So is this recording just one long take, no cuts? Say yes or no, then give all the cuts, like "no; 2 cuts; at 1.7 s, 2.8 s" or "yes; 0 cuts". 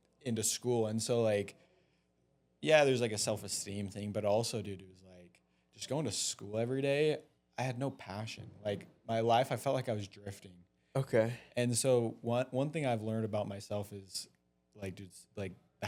yes; 0 cuts